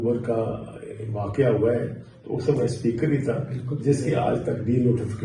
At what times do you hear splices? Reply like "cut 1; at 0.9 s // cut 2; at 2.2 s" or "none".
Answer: none